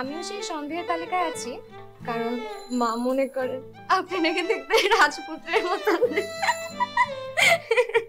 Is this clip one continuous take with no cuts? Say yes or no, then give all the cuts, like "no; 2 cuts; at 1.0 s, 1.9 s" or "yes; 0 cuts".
yes; 0 cuts